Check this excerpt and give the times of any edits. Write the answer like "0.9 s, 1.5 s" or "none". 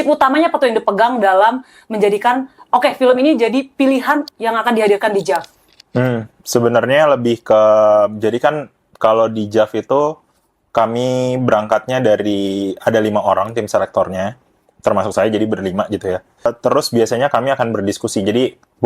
16.5 s